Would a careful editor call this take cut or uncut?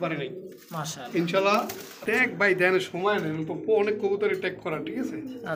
cut